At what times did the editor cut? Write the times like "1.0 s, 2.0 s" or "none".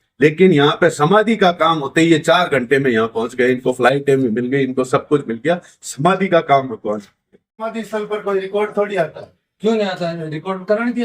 7.7 s